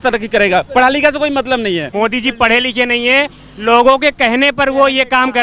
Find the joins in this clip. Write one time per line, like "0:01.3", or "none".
0:01.9